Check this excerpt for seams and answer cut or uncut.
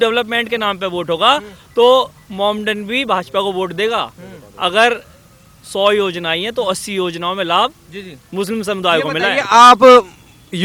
uncut